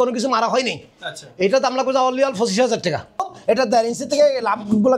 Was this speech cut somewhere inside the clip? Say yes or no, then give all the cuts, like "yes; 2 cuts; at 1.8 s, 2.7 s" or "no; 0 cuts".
yes; 1 cut; at 3.3 s